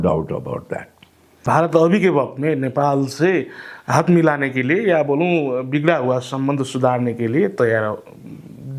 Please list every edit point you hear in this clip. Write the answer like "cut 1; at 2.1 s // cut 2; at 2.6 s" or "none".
cut 1; at 1.4 s